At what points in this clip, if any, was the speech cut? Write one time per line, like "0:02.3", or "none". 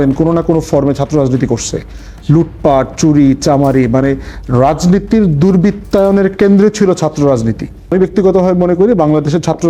0:07.8